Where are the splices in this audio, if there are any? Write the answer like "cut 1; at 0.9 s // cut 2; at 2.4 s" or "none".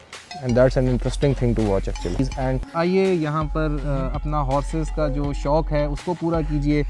cut 1; at 2.4 s